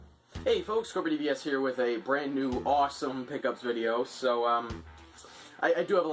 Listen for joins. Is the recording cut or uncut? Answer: uncut